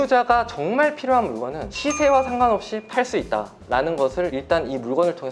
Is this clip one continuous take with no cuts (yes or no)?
yes